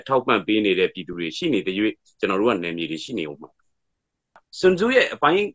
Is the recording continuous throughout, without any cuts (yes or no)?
no